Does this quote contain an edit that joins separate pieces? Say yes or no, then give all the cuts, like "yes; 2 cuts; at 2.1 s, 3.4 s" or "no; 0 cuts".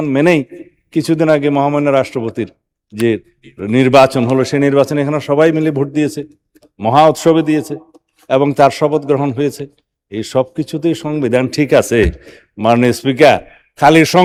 no; 0 cuts